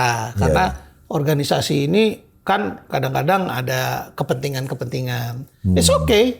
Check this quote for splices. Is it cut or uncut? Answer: uncut